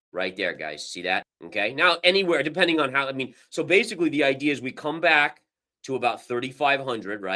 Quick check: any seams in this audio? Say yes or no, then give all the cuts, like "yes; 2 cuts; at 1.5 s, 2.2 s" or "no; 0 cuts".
yes; 1 cut; at 1.4 s